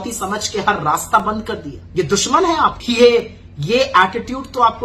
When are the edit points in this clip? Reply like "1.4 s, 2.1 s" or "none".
1.8 s, 2.8 s